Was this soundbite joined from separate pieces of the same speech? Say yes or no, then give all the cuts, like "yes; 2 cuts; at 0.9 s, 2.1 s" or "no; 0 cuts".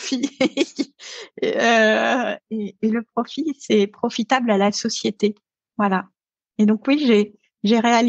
no; 0 cuts